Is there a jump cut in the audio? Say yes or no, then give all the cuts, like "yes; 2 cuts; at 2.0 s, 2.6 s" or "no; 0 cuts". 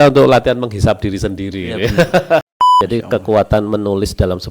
yes; 1 cut; at 2.5 s